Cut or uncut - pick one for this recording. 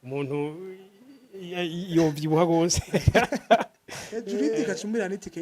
cut